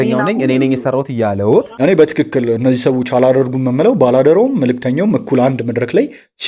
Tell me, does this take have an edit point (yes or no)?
yes